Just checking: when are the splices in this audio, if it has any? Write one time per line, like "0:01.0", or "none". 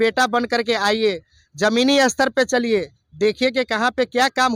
none